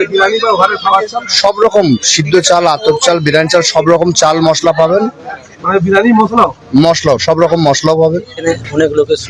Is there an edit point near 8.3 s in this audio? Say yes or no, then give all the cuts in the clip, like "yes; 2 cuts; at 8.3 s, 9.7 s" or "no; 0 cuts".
yes; 1 cut; at 8.3 s